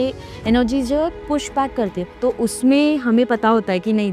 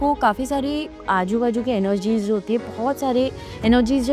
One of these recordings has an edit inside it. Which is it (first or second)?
first